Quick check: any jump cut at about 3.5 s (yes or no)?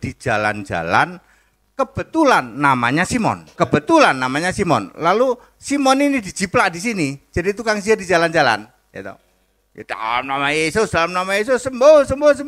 yes